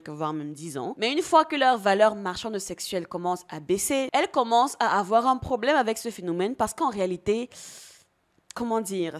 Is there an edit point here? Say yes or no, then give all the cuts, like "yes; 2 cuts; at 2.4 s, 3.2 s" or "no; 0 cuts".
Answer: yes; 2 cuts; at 0.9 s, 4.1 s